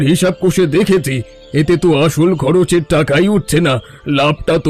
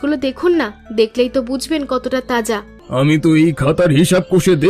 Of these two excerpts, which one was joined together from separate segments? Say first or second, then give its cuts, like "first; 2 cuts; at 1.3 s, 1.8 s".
second; 1 cut; at 2.7 s